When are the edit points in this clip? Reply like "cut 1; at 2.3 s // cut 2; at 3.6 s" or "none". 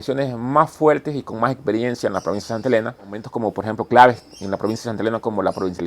cut 1; at 3.2 s